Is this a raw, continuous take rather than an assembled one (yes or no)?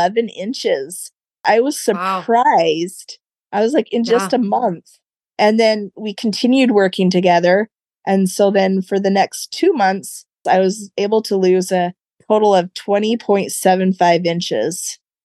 no